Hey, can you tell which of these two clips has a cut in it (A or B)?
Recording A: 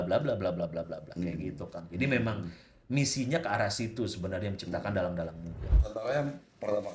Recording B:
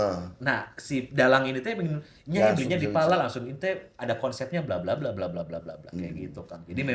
A